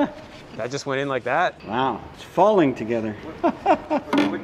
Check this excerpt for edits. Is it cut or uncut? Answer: cut